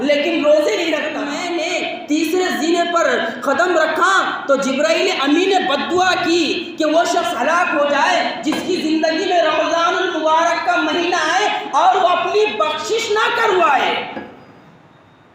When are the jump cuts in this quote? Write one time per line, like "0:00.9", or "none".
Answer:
0:01.3

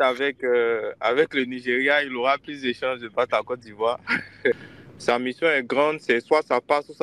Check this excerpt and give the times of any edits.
0:04.6

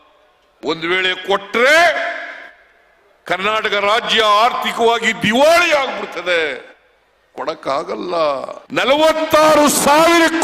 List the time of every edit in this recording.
0:08.5

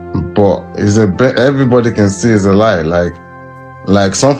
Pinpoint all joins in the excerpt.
none

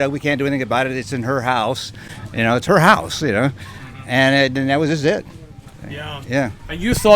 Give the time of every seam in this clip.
none

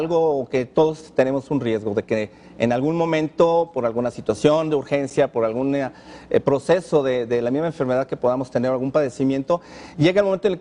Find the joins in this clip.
0:05.1

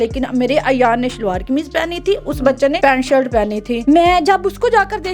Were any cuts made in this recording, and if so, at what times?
0:02.8
0:03.8

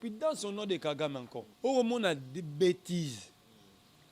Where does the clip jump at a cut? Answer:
0:01.4

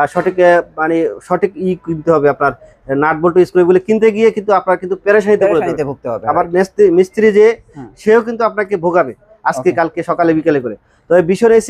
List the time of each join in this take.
none

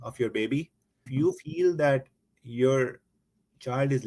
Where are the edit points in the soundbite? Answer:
0:01.1

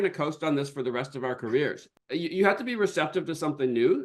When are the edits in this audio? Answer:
0:01.9

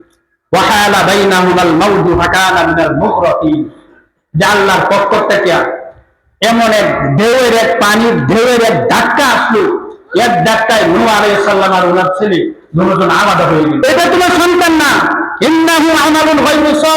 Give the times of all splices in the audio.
0:13.8

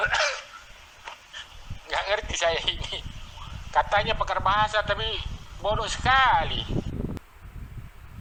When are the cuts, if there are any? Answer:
none

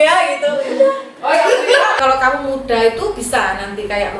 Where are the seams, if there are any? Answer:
0:01.9

